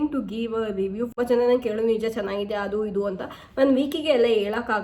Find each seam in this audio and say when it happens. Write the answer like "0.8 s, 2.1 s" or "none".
1.1 s

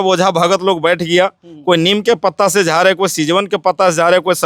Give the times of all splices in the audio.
none

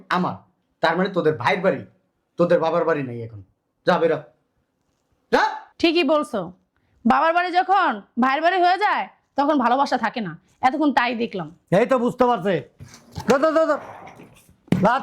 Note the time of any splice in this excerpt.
none

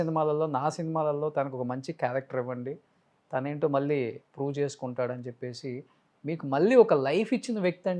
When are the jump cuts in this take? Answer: none

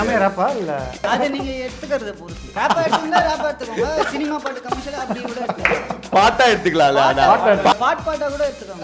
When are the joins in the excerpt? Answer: 1.1 s, 2.6 s, 7.7 s

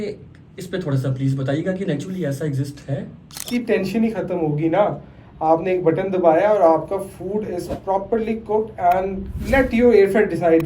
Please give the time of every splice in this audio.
3.4 s

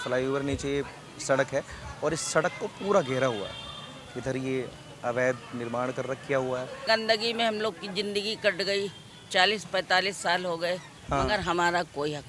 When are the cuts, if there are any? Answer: 6.9 s, 10.9 s

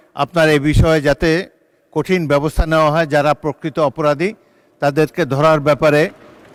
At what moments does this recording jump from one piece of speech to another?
none

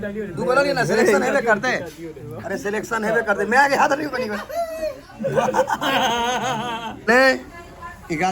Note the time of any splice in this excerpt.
6.9 s

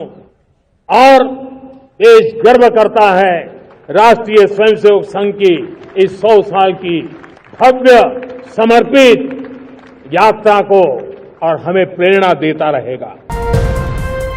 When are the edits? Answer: 13.2 s

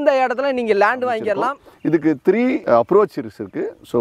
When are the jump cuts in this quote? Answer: 1.6 s, 2.6 s

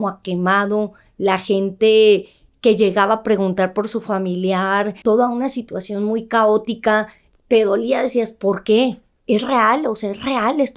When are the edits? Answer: 5.0 s, 7.2 s, 9.1 s

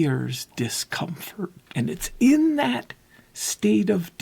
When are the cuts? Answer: 1.6 s

